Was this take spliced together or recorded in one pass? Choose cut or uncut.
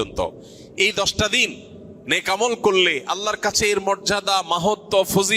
uncut